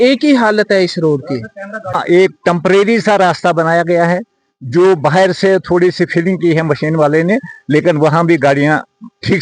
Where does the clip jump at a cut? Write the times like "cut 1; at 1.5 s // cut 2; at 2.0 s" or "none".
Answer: cut 1; at 1.9 s